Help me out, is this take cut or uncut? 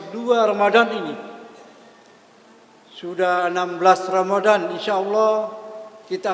uncut